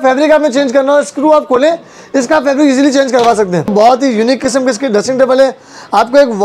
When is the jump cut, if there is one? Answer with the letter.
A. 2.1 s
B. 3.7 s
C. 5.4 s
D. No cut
B